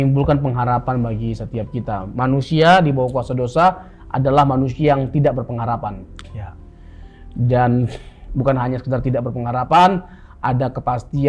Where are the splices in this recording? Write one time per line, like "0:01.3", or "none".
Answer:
none

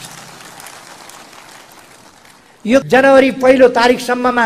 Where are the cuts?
0:02.9

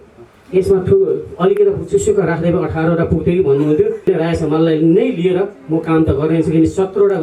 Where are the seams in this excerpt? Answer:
0:04.0

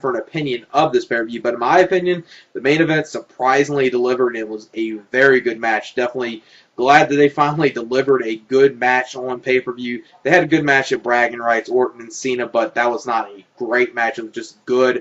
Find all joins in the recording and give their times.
0:09.9

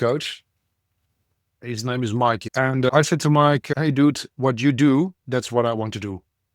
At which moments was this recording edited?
0:02.4

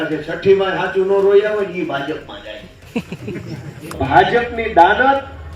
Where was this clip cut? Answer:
0:04.0

